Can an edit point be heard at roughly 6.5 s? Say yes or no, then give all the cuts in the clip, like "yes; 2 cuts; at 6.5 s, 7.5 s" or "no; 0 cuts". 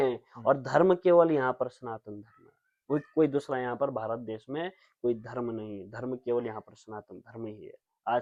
no; 0 cuts